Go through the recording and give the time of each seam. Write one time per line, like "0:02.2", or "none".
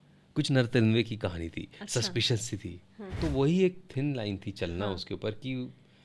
0:03.2